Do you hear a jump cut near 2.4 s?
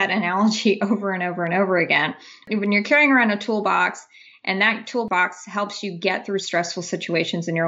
yes; 2 cuts; at 2.4 s, 5.1 s

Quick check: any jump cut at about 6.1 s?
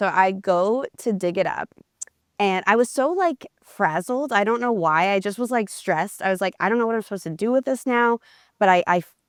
no; 0 cuts

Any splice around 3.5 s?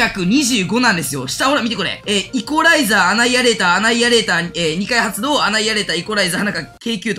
no; 1 cut; at 1.9 s

